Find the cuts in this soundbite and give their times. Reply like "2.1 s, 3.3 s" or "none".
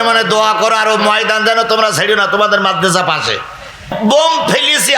3.9 s